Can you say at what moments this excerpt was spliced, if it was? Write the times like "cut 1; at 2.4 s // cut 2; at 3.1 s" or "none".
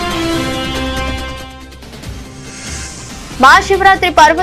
cut 1; at 3.4 s